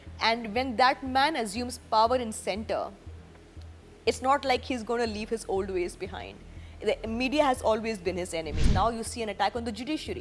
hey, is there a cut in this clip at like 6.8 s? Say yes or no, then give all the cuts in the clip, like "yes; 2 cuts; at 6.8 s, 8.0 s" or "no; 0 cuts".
no; 1 cut; at 8.7 s